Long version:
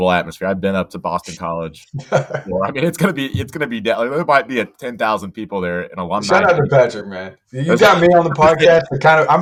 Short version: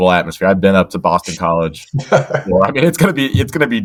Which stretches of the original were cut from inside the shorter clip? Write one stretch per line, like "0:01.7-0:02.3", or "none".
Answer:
none